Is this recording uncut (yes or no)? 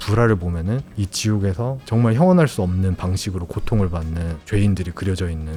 yes